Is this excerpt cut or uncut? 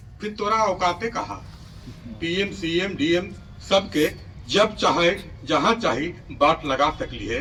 uncut